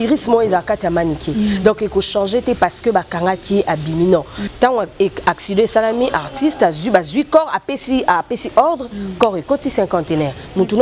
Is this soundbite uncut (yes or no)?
no